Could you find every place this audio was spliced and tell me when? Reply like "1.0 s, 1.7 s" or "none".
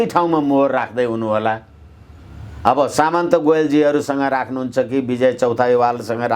none